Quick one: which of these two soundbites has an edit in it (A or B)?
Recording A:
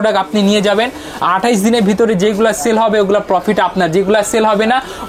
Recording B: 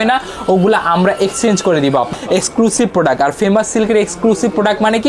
B